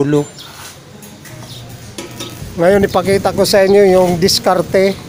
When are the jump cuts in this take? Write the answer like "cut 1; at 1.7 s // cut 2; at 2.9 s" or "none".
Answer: cut 1; at 2.4 s